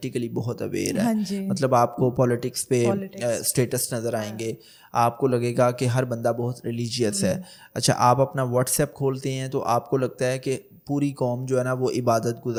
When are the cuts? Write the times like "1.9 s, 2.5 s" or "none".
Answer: none